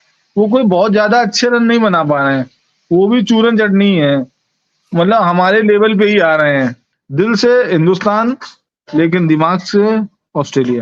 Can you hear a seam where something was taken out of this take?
yes; 1 cut; at 6.9 s

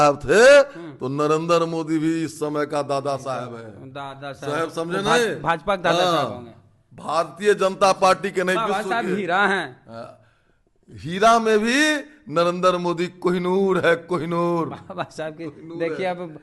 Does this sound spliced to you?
no; 0 cuts

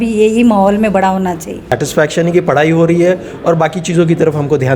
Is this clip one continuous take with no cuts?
no; 1 cut; at 1.6 s

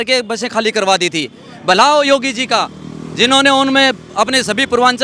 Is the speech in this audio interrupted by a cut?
no; 0 cuts

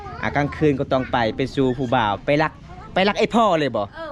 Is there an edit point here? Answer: no; 0 cuts

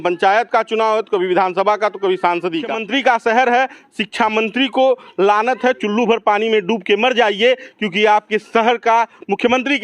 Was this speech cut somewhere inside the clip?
yes; 1 cut; at 2.8 s

